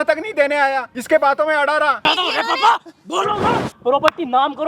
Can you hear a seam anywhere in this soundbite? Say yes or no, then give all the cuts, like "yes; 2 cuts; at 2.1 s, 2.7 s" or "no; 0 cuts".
yes; 3 cuts; at 0.9 s, 2.0 s, 3.7 s